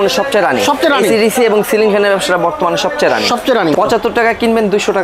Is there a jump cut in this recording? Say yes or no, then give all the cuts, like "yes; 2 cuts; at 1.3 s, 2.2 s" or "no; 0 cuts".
yes; 1 cut; at 3.7 s